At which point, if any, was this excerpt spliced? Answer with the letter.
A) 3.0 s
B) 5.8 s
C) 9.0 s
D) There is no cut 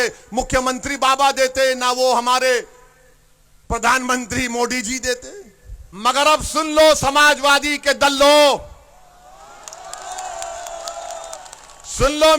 B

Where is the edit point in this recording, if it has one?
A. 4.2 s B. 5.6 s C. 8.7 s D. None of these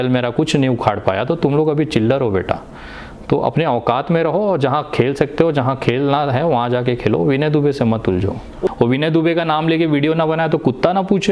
C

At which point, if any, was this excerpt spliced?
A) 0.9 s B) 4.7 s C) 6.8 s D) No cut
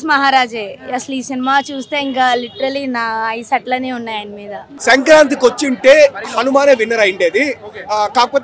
B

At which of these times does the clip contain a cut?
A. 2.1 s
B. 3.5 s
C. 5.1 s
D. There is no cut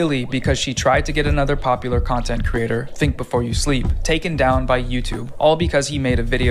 D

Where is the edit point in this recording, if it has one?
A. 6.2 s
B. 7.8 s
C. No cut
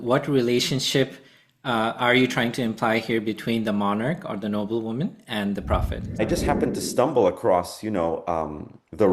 A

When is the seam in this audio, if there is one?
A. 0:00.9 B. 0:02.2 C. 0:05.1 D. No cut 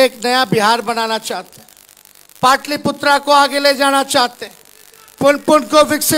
D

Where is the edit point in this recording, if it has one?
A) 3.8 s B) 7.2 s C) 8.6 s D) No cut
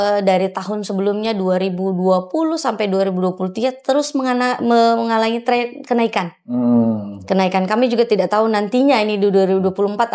D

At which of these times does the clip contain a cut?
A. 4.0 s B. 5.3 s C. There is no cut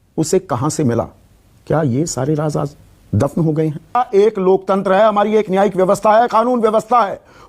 A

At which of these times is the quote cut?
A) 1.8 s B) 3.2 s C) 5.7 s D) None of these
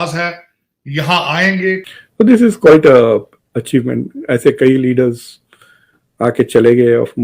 A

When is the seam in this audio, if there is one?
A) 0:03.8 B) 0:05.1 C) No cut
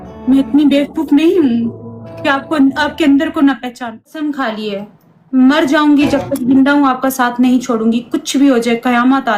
A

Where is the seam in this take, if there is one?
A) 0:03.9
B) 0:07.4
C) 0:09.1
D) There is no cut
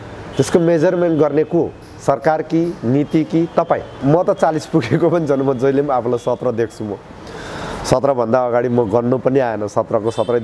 A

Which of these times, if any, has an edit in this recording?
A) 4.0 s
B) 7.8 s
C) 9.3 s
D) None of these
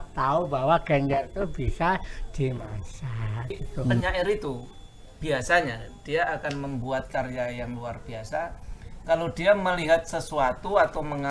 A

